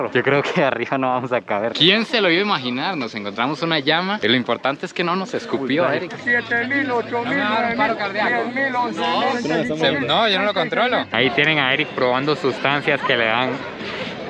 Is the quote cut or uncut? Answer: cut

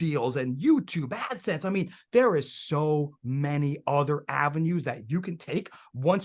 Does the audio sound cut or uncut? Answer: uncut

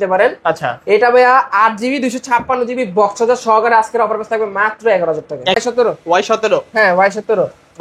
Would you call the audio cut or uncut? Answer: cut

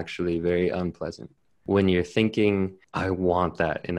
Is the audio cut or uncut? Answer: cut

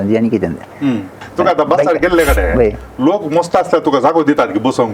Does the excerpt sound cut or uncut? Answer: cut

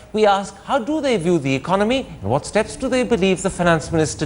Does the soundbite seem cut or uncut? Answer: cut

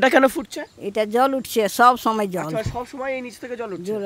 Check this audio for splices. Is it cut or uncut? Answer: uncut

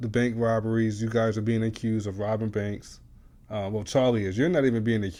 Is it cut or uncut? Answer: uncut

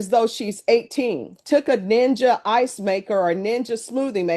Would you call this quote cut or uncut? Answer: cut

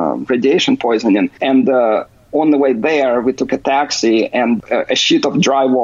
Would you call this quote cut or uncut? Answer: cut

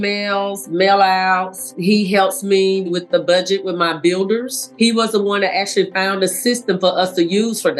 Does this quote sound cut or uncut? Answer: cut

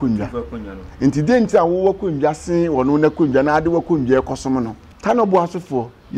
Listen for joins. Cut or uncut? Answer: cut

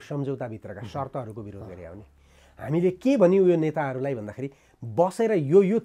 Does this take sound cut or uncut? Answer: uncut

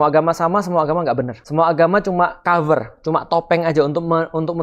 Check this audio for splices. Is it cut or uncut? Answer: cut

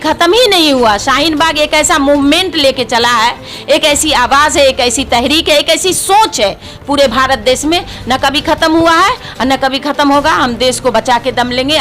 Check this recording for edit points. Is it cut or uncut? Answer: uncut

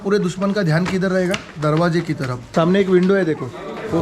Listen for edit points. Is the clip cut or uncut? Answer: cut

